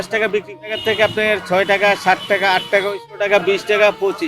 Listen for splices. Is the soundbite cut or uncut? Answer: cut